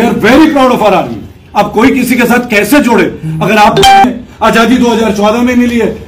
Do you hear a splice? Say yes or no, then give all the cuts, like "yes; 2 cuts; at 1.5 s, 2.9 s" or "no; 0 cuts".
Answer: yes; 1 cut; at 4.0 s